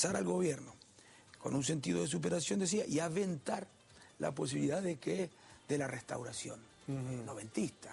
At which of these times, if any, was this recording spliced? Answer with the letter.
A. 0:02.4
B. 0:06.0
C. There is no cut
B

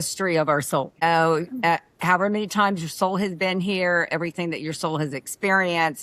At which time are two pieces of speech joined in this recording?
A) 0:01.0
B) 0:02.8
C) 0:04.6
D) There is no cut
A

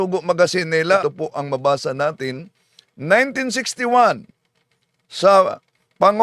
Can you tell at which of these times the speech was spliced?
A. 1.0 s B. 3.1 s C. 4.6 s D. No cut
A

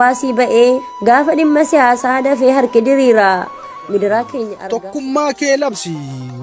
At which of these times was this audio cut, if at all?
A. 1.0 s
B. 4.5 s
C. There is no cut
B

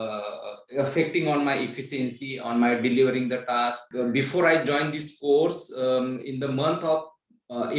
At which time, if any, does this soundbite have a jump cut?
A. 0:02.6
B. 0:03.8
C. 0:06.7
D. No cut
B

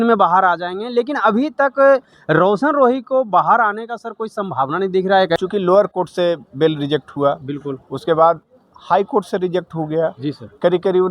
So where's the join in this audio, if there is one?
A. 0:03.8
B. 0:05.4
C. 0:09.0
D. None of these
B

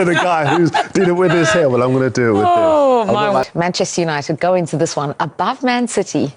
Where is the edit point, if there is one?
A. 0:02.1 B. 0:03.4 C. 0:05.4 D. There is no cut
B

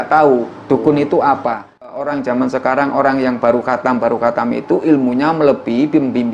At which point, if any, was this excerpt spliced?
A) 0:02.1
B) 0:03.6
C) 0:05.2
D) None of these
A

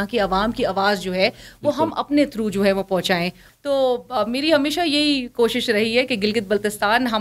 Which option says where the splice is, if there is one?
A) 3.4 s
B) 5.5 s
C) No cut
A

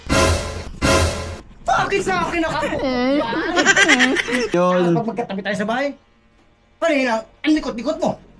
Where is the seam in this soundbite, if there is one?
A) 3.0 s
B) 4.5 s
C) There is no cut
B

